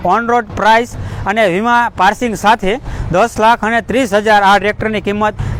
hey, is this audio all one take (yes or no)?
yes